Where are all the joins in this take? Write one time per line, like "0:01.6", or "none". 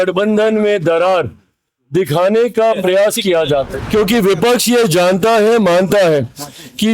0:03.8